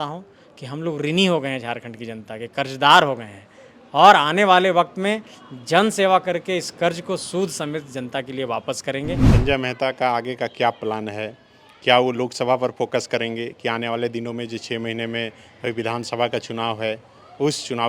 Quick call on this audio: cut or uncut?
cut